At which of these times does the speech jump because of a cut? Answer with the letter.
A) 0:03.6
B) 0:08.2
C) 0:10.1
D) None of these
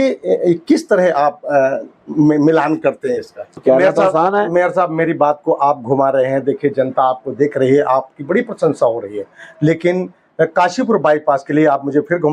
A